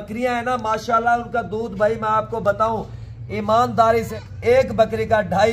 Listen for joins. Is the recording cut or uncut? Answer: cut